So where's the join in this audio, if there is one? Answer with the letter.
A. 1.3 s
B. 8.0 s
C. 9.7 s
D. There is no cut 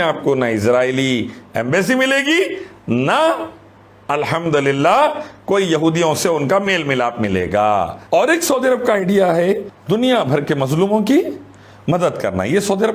B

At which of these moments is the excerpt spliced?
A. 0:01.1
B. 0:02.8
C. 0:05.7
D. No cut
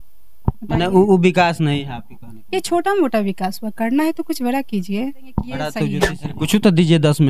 C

